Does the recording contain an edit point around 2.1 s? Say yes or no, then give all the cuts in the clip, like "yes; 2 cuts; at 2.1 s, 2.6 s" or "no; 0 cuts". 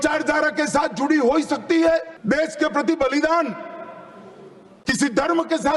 yes; 1 cut; at 2.1 s